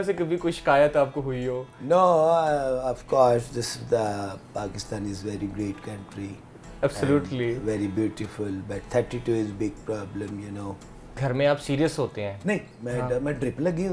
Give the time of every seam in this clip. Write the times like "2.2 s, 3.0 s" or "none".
11.2 s

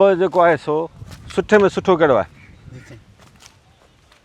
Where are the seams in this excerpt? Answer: none

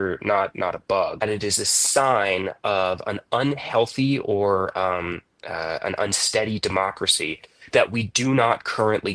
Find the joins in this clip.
1.2 s

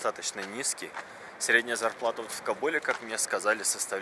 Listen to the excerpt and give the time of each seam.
none

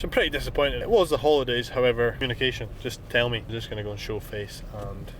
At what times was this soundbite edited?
0.8 s, 2.2 s, 3.5 s

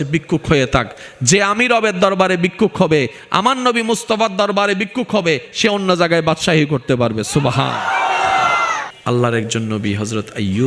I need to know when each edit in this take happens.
9.0 s

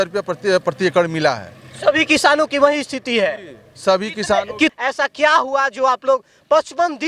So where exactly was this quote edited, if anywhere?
4.7 s

